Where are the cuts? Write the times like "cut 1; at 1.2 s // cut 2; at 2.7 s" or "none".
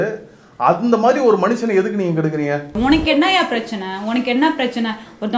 cut 1; at 2.7 s